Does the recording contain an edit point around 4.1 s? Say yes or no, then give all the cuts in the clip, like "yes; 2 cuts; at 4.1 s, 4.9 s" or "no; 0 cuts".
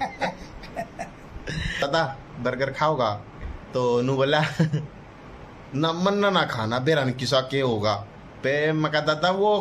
no; 1 cut; at 1.8 s